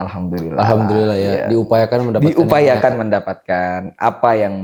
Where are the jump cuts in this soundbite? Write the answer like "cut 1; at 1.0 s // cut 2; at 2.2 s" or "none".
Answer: none